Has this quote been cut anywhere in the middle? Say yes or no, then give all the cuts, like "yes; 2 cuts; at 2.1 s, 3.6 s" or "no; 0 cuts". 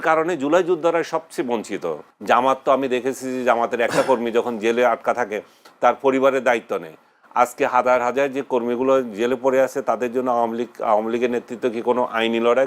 yes; 1 cut; at 2.1 s